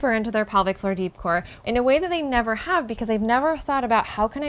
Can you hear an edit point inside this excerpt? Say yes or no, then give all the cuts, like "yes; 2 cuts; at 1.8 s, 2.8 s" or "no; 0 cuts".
yes; 1 cut; at 1.5 s